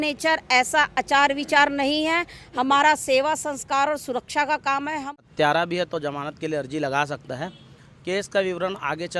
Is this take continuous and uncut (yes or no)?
no